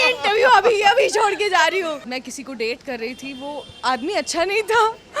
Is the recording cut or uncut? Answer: cut